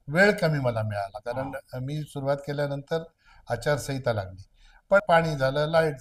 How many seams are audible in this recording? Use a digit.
1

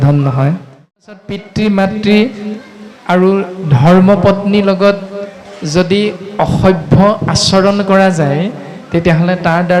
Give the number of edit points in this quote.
1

